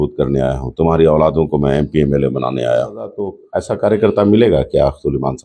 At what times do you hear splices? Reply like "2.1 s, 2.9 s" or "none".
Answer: 3.5 s